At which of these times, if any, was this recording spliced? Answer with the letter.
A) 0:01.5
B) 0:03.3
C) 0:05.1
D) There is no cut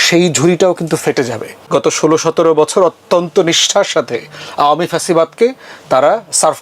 A